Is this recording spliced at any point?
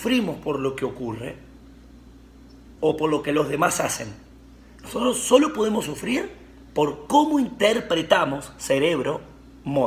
no; 0 cuts

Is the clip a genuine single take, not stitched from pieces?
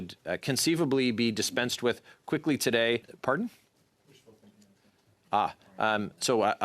no; 1 cut; at 3.1 s

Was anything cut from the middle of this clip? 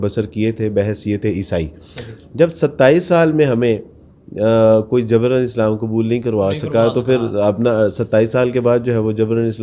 no; 0 cuts

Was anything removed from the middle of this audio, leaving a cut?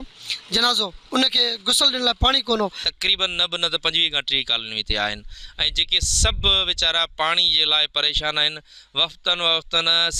no; 0 cuts

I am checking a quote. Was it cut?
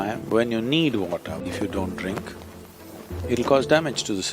yes; 1 cut; at 1.4 s

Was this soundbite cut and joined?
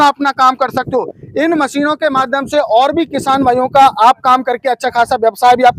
no; 0 cuts

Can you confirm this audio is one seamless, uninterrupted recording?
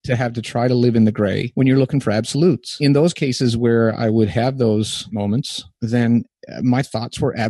no; 3 cuts; at 1.4 s, 2.8 s, 5.3 s

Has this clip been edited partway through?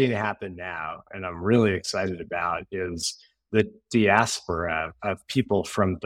no; 0 cuts

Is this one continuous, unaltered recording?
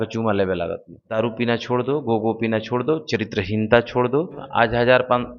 no; 2 cuts; at 1.0 s, 4.4 s

